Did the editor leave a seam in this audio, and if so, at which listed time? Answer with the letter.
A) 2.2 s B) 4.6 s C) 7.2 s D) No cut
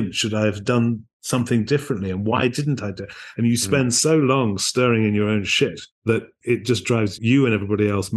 C